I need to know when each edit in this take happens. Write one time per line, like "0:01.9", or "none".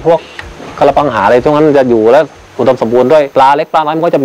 0:03.3